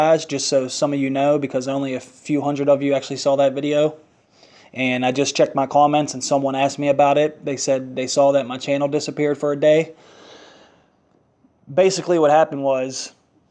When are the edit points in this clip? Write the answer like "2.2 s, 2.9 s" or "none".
none